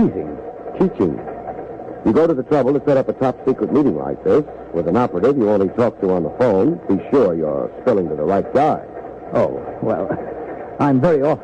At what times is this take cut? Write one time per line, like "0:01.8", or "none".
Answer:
none